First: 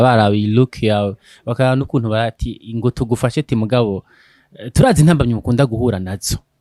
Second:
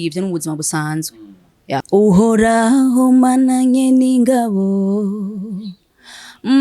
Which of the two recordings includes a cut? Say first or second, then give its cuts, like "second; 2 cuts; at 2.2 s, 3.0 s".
second; 1 cut; at 1.8 s